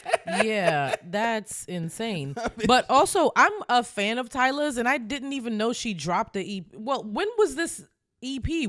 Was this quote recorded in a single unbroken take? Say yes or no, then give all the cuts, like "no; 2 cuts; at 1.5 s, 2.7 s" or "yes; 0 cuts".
yes; 0 cuts